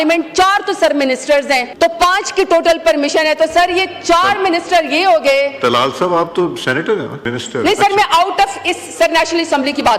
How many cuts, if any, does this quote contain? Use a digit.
2